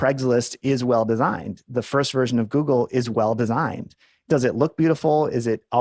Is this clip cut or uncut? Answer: cut